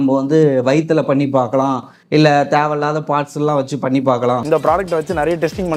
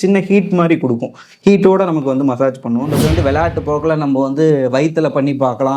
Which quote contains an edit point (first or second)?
second